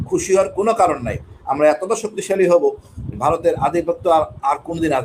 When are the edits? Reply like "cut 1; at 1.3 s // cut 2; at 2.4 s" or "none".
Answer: none